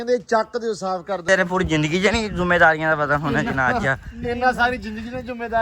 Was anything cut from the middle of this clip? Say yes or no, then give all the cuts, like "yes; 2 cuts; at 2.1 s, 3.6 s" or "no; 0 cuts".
yes; 1 cut; at 1.2 s